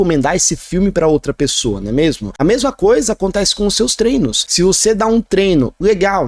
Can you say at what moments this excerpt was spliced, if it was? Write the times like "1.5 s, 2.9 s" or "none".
2.3 s, 4.4 s